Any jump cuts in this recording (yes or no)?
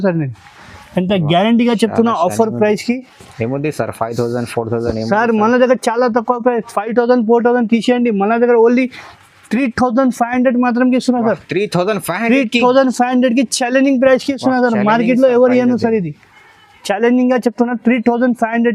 no